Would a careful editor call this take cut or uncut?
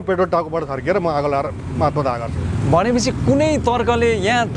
uncut